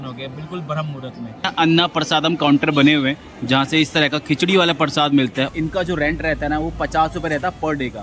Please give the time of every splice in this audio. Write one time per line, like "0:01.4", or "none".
0:01.5
0:05.5